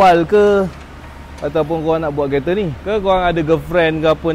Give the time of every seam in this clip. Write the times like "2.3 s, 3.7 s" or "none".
2.8 s